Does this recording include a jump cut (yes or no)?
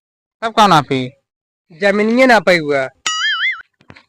no